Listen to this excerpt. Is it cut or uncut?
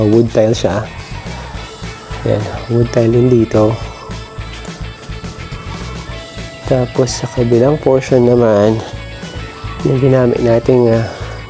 uncut